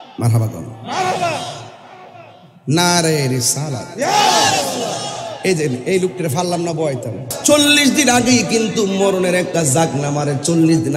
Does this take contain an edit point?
yes; 1 cut; at 7.3 s

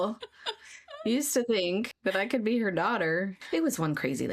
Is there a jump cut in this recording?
yes; 2 cuts; at 1.9 s, 3.4 s

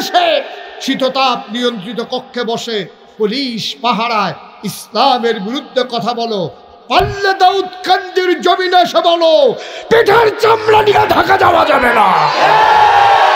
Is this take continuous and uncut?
yes; 0 cuts

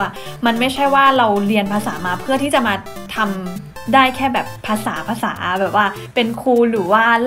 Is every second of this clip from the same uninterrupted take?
yes; 0 cuts

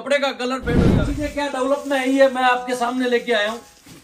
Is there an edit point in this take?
yes; 1 cut; at 1.0 s

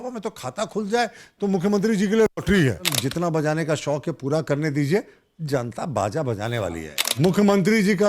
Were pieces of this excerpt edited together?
yes; 2 cuts; at 3.0 s, 7.0 s

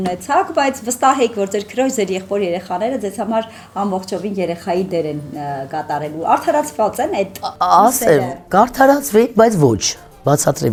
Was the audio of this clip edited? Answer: no; 0 cuts

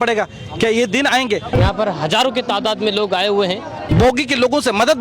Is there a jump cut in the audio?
yes; 2 cuts; at 1.5 s, 3.8 s

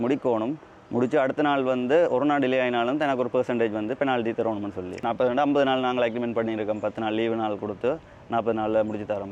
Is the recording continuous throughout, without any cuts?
no; 1 cut; at 5.0 s

